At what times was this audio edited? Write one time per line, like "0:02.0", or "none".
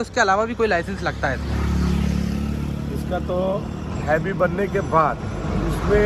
none